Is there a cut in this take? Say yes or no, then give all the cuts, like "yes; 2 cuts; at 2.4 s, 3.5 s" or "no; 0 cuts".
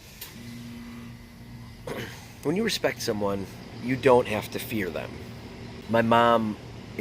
yes; 1 cut; at 5.7 s